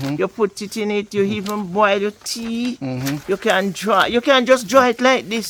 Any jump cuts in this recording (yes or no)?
no